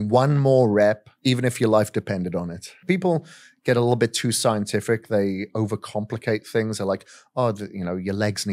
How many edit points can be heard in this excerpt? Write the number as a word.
two